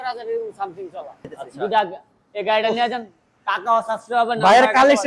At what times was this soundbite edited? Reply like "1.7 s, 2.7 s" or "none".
1.4 s